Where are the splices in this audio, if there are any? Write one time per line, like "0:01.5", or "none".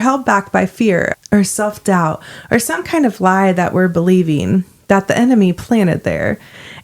0:01.1